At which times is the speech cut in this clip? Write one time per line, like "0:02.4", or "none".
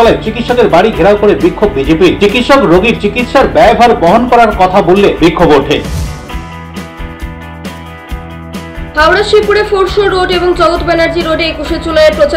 none